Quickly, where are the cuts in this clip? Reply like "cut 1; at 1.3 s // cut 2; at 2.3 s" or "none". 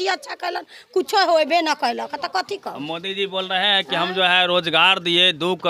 none